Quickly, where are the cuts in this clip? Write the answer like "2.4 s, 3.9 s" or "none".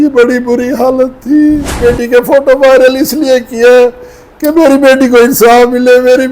1.7 s